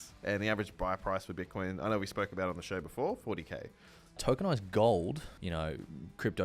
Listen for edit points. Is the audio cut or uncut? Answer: cut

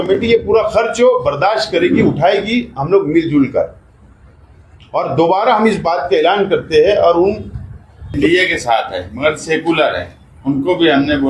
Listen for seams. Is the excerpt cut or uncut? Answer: cut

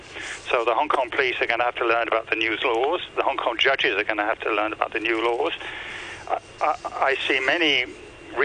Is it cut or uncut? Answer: uncut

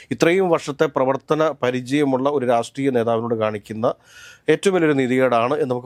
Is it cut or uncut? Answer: uncut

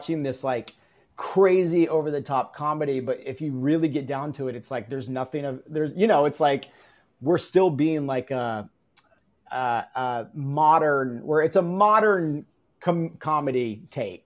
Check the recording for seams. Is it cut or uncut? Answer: uncut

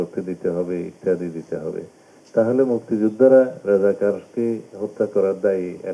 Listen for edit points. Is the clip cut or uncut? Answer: uncut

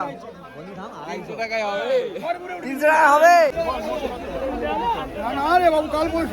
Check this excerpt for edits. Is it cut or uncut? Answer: cut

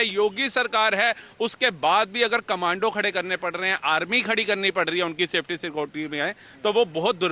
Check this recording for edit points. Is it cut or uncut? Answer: uncut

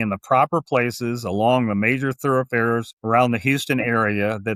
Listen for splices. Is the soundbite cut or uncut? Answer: cut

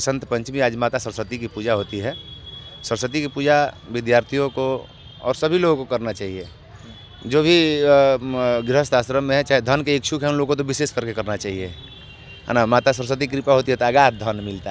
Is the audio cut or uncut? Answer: uncut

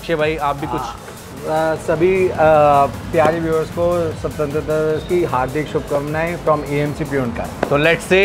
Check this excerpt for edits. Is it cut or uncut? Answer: uncut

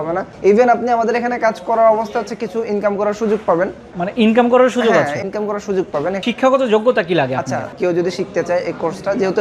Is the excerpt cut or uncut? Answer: cut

